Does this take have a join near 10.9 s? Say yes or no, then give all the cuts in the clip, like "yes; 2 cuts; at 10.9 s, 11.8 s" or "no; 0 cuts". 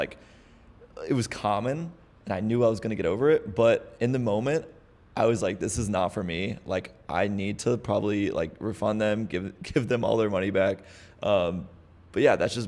no; 0 cuts